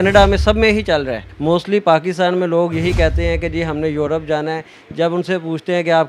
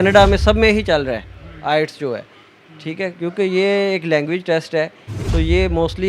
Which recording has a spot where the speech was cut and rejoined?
first; 1 cut; at 1.2 s

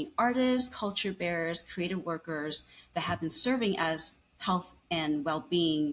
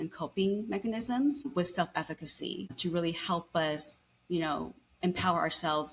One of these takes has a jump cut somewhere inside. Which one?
second; 2 cuts; at 1.5 s, 2.8 s

